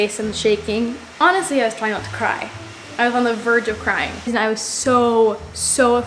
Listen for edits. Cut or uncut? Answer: cut